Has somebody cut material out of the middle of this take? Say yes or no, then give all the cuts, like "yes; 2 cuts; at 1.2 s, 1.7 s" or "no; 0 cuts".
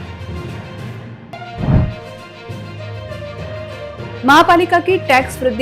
no; 0 cuts